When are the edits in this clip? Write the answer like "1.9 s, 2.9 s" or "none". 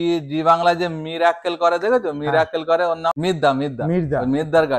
3.2 s